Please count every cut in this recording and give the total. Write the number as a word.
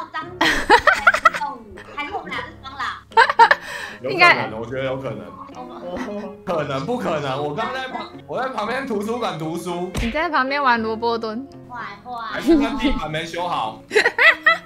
zero